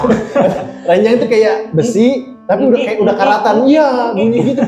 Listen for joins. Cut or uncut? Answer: uncut